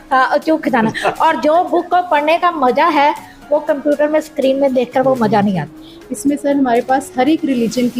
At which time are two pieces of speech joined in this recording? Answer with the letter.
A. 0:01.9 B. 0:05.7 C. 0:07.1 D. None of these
B